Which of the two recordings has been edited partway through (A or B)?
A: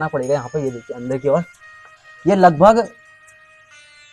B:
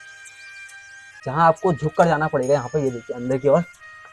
B